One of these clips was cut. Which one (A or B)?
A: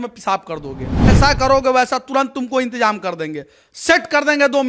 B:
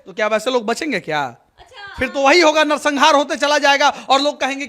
A